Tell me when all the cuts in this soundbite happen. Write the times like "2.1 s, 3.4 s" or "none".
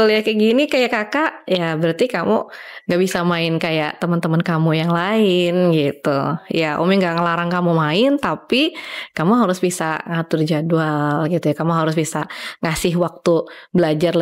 none